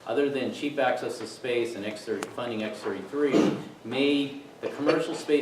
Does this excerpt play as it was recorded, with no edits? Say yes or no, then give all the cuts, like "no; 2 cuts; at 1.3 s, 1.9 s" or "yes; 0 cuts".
no; 1 cut; at 2.4 s